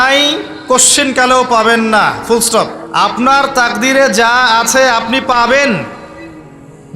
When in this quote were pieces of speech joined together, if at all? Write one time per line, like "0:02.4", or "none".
0:02.8